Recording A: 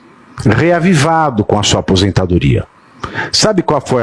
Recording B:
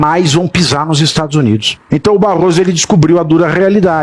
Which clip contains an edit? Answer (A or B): B